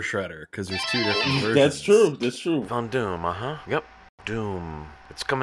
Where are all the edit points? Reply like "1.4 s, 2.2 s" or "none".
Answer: 2.6 s